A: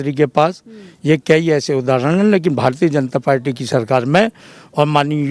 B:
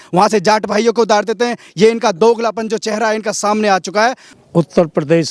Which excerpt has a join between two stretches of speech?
B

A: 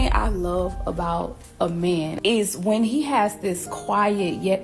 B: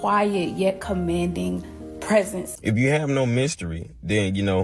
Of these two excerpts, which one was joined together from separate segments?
B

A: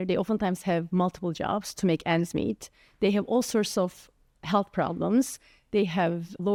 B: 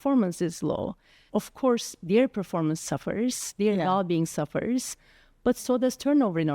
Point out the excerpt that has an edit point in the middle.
B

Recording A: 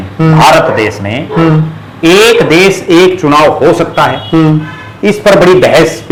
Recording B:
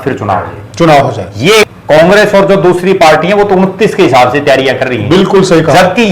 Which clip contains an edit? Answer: B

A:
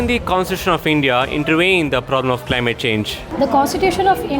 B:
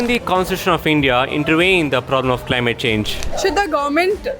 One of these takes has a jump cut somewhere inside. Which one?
B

